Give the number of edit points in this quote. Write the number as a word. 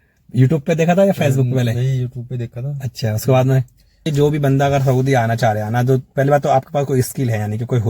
one